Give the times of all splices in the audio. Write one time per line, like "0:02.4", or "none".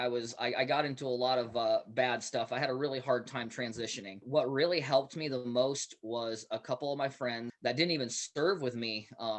0:04.2
0:07.5